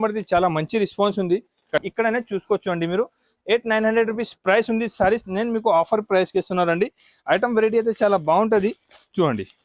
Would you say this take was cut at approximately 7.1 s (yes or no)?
no